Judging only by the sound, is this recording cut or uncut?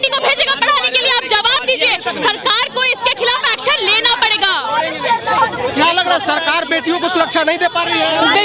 uncut